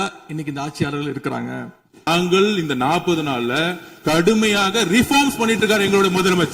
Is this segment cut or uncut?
cut